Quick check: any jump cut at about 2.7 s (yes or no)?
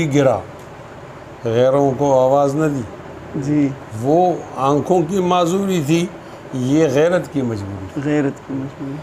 no